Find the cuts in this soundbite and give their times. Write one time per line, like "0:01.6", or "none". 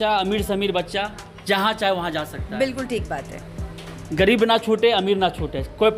none